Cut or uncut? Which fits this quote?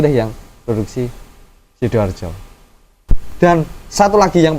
cut